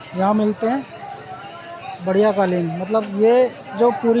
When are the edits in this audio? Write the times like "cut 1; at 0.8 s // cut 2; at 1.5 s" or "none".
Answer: none

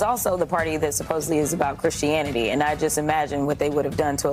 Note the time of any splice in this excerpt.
none

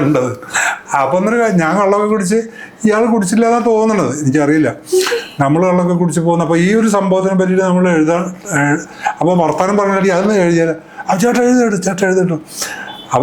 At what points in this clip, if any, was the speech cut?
none

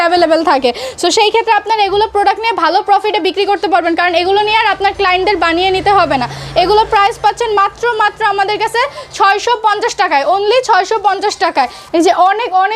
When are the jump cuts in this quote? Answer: none

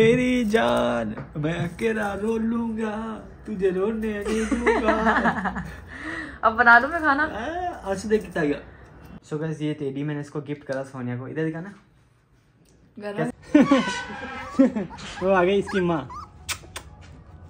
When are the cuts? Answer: cut 1; at 9.2 s // cut 2; at 13.3 s

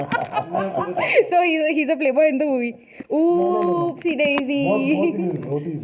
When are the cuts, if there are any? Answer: none

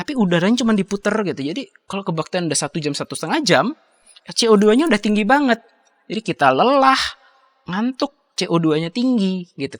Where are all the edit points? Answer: none

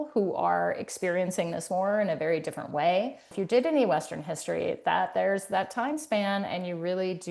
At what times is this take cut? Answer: cut 1; at 3.3 s

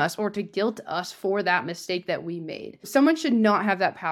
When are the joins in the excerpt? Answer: cut 1; at 2.9 s

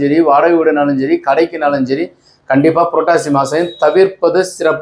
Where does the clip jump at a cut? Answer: none

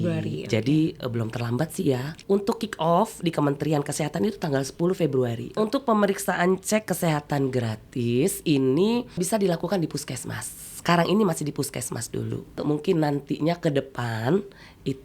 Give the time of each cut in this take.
cut 1; at 2.2 s // cut 2; at 5.6 s // cut 3; at 9.2 s // cut 4; at 12.6 s

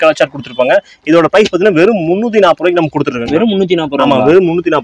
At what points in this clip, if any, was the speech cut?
none

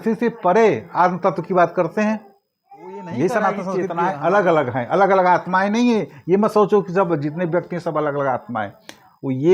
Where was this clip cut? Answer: cut 1; at 3.8 s

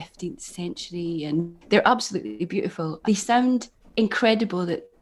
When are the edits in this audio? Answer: cut 1; at 1.6 s // cut 2; at 2.9 s // cut 3; at 3.8 s

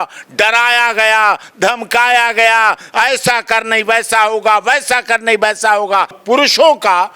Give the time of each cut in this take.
cut 1; at 6.2 s

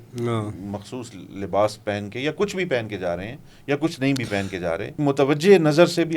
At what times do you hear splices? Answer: cut 1; at 5.0 s

